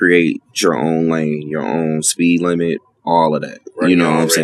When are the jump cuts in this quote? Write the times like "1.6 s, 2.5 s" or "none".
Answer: none